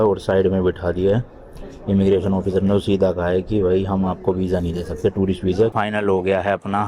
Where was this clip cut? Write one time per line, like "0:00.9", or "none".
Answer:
0:05.7